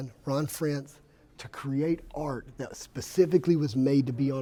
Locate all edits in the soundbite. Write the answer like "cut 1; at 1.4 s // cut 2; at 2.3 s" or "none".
none